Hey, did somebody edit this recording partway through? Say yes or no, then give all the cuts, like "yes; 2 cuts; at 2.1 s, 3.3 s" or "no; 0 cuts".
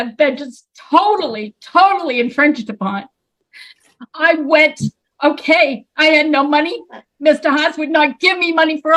no; 0 cuts